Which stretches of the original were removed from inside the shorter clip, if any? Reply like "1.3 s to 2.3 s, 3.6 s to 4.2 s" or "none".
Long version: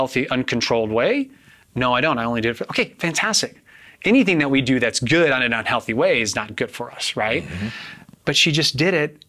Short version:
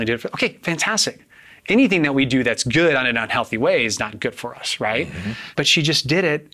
7.8 s to 8.1 s

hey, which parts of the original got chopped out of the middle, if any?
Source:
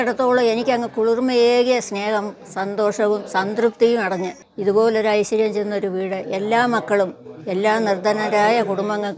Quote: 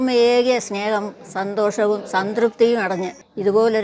none

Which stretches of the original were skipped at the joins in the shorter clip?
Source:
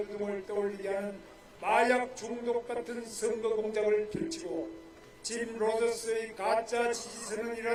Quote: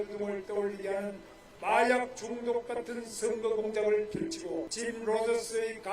4.7 s to 5.3 s

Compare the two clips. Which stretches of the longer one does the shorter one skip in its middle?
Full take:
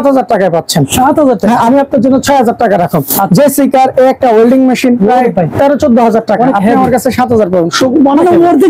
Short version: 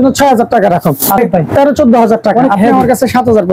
3.3 s to 5.2 s

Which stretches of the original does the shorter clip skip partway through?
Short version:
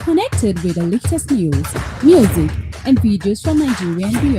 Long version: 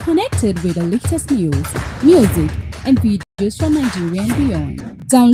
3.2 s to 3.4 s

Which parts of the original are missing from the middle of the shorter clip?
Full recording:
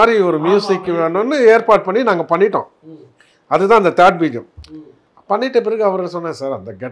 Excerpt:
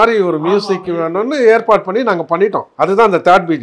2.6 s to 3.4 s

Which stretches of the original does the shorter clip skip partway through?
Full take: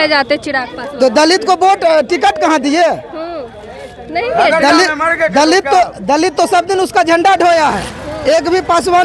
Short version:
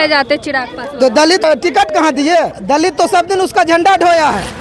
1.4 s to 1.9 s, 3.0 s to 6.0 s

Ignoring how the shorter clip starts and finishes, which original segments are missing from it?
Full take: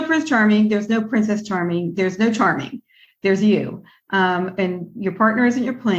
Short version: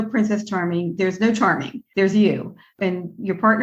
2.7 s to 3.0 s, 4.0 s to 4.5 s

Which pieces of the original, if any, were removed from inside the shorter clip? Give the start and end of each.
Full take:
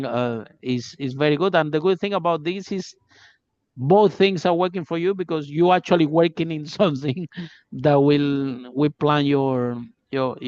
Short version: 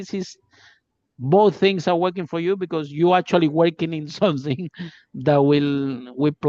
none

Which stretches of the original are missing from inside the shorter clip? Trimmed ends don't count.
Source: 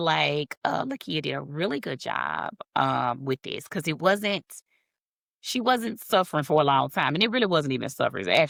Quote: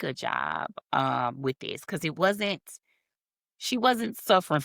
none

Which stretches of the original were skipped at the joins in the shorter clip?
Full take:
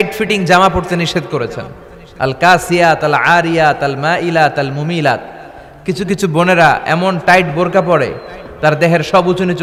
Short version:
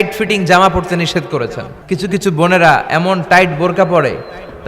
1.7 s to 5.7 s

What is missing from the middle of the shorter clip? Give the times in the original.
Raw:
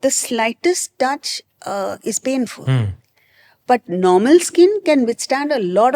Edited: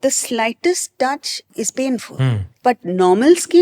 1.5 s to 2.0 s, 3.0 s to 3.5 s

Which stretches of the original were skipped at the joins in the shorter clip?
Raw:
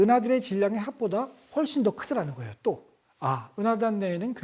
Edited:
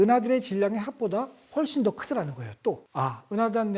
2.9 s to 3.1 s

